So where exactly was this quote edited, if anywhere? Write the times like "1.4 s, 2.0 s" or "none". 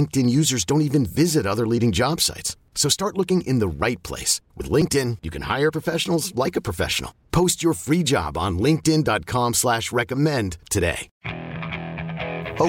11.1 s